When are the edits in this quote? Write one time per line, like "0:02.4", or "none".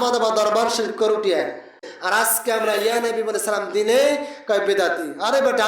0:01.9